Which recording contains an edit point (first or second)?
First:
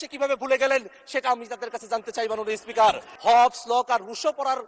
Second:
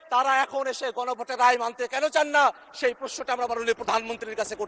first